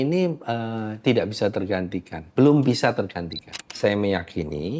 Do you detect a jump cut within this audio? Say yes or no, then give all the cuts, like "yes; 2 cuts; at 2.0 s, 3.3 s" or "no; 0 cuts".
yes; 1 cut; at 3.8 s